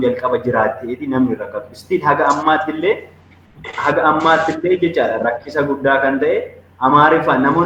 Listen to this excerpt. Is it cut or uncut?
uncut